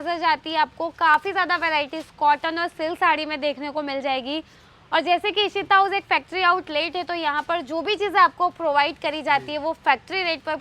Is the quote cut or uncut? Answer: uncut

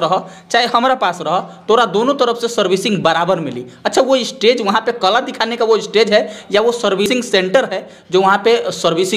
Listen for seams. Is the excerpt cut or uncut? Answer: cut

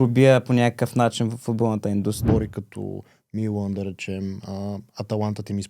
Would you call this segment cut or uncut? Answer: cut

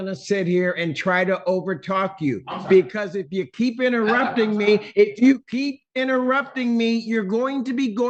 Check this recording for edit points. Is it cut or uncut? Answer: uncut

